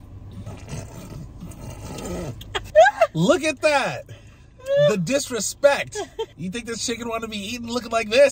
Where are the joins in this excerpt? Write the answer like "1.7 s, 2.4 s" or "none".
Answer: 2.7 s, 6.3 s

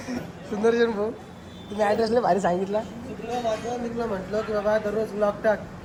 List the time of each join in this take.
none

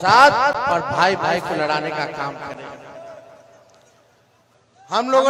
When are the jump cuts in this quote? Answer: none

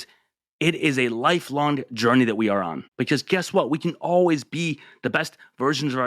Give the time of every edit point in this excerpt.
2.8 s

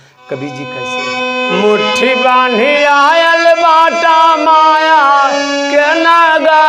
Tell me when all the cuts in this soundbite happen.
1.0 s

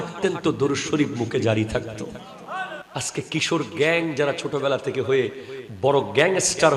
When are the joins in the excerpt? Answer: 2.8 s

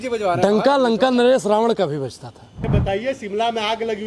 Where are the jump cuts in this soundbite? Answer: 2.8 s

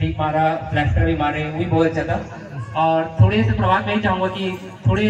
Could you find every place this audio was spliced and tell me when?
none

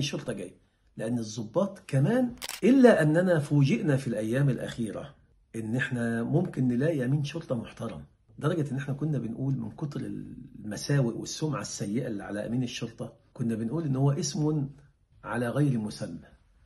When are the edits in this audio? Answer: 2.4 s

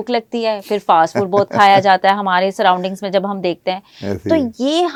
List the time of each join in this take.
none

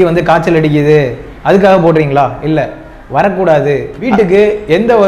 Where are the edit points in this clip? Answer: 4.1 s

